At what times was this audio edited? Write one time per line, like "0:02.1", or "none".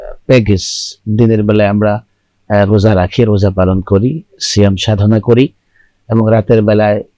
none